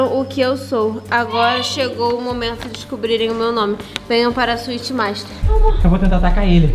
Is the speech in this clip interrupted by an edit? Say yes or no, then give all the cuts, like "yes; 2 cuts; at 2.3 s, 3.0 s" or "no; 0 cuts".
yes; 1 cut; at 5.4 s